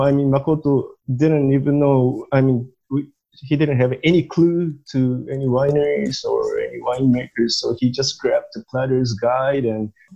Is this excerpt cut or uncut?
uncut